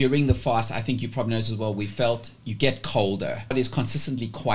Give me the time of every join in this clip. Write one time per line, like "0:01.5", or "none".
0:03.5